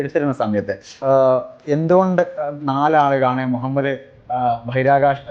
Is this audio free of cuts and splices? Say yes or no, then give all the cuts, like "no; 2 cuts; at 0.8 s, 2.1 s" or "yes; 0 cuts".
no; 1 cut; at 1.0 s